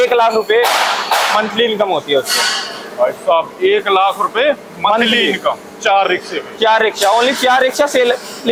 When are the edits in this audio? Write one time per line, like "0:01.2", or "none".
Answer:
none